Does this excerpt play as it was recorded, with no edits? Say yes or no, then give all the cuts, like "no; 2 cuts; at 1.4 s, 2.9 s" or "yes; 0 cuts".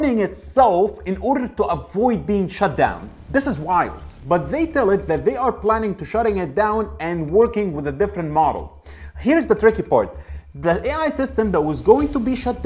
no; 1 cut; at 4.1 s